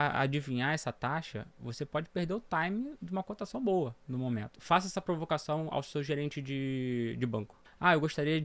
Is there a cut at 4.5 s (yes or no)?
yes